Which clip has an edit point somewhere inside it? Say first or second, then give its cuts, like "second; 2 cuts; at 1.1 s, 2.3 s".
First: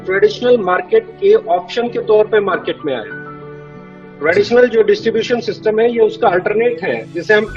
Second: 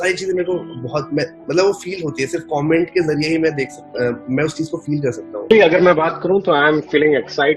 second; 1 cut; at 5.5 s